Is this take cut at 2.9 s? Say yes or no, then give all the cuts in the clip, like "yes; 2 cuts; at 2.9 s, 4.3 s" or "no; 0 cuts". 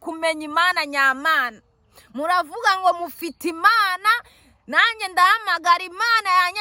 no; 0 cuts